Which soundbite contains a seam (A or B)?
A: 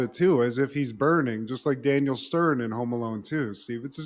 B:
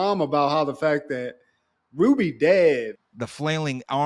B